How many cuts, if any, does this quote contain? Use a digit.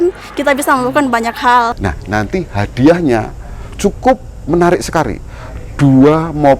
1